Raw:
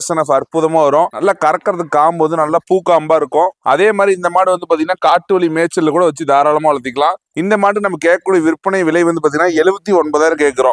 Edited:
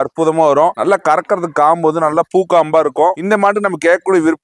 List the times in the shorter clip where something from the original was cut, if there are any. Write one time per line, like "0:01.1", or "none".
0:03.2